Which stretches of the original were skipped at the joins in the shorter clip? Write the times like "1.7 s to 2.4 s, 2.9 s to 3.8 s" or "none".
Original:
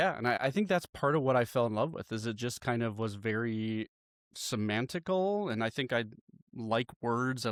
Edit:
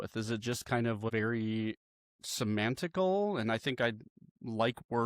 3.1 s to 3.2 s